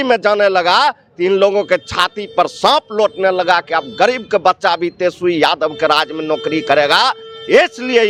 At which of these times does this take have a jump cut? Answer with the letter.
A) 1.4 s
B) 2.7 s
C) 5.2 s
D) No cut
D